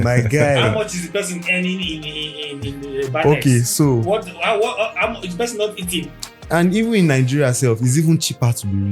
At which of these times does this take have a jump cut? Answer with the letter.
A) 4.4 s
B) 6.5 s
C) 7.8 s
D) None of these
B